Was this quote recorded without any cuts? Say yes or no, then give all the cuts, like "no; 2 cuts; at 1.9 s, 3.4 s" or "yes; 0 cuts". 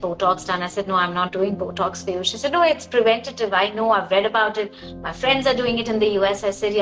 yes; 0 cuts